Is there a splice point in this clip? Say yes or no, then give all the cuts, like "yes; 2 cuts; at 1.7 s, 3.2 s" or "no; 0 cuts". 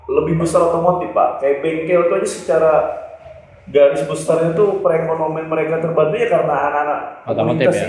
no; 0 cuts